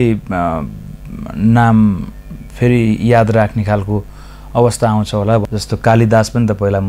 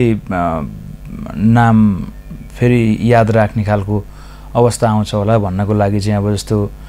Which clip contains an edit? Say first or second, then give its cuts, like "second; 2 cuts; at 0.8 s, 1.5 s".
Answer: first; 1 cut; at 5.5 s